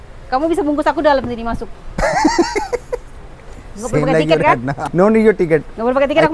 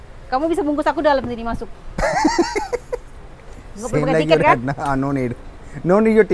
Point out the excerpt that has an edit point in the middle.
first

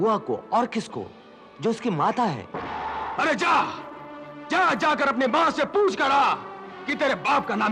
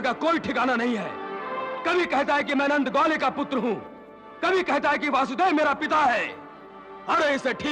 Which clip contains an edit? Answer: first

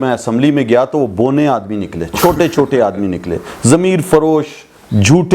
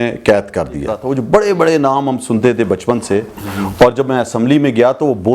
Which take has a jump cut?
second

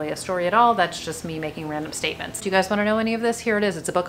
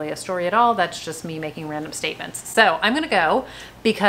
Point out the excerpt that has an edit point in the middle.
first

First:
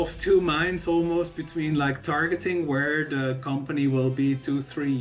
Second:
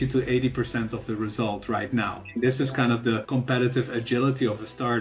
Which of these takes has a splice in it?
second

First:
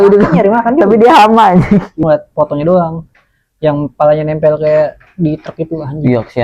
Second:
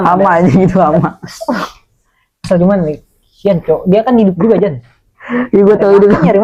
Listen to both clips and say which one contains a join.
first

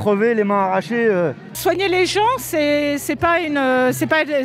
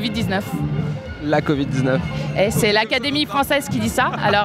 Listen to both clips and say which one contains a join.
first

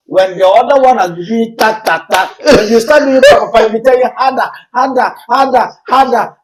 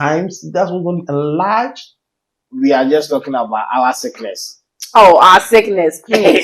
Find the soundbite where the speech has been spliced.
second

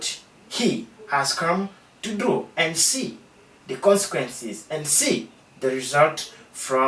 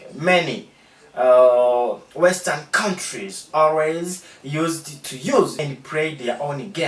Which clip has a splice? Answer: second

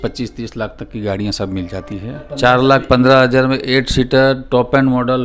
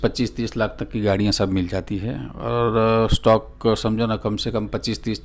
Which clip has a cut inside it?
first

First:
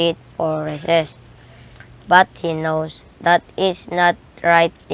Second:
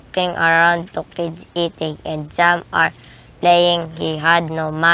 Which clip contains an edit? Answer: second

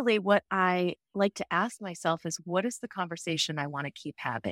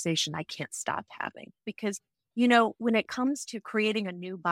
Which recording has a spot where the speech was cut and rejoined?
second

